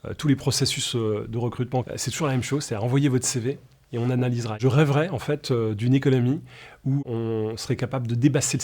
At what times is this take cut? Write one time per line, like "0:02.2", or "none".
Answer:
0:01.8
0:07.0